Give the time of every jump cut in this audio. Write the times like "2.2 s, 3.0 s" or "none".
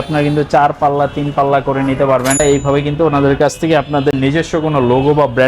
2.4 s